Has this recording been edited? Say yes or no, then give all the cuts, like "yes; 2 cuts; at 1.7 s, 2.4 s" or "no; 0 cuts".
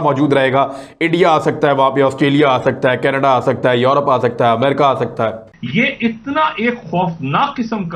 yes; 1 cut; at 5.5 s